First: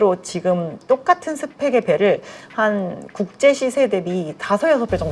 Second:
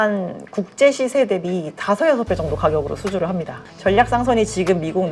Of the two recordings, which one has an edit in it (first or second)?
second